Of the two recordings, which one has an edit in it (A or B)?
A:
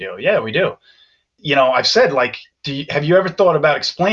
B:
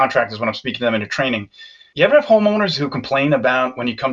A